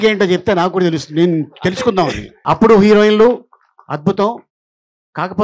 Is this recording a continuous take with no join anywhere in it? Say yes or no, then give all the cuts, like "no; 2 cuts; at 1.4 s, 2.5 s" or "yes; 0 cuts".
no; 1 cut; at 2.4 s